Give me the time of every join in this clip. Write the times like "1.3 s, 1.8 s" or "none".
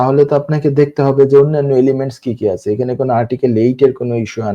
none